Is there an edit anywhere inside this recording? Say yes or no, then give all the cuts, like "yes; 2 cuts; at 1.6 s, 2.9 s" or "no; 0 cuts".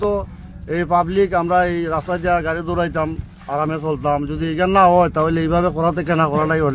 no; 0 cuts